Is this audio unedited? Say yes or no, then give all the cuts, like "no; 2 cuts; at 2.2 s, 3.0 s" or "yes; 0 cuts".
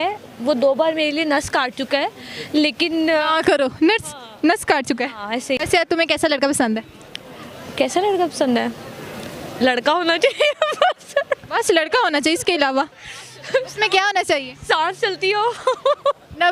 yes; 0 cuts